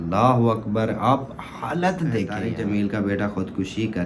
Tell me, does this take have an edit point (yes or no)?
yes